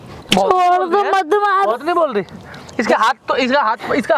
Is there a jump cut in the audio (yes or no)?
no